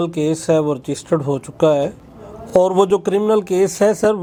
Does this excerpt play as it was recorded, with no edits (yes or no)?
yes